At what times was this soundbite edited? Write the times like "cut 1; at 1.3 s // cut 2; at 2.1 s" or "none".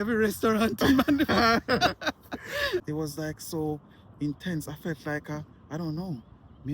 cut 1; at 2.9 s

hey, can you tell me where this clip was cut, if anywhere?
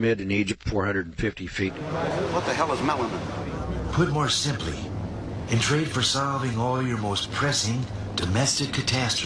cut 1; at 1.8 s

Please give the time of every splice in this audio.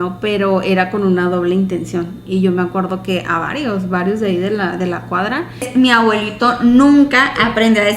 cut 1; at 5.7 s

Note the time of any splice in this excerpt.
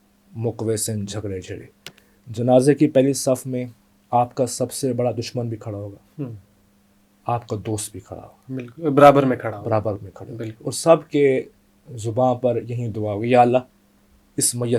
none

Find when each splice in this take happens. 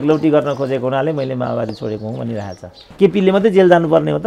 cut 1; at 2.8 s

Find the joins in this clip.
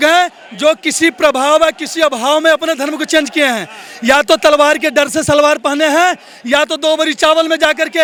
none

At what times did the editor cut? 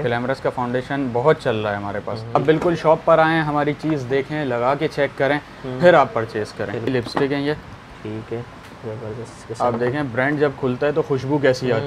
cut 1; at 2.4 s // cut 2; at 6.9 s

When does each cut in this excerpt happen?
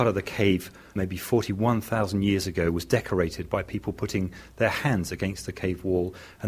cut 1; at 0.9 s

